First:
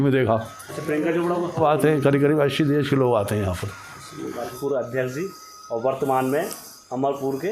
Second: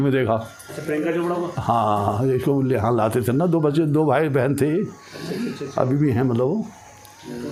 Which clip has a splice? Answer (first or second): first